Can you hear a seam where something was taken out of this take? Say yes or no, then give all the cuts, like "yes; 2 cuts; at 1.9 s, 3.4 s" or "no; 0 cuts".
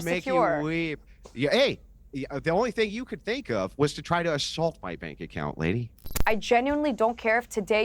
yes; 1 cut; at 6.1 s